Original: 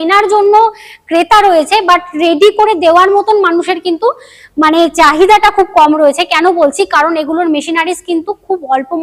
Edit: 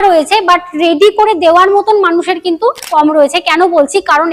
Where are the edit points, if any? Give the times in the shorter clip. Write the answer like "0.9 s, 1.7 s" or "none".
2.9 s